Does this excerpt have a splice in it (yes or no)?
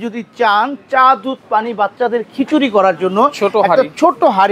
no